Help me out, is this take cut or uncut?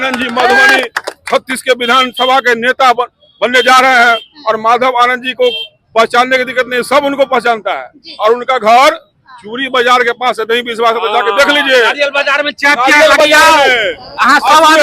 uncut